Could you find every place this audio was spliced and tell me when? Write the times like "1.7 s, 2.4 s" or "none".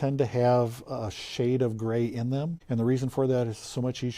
2.6 s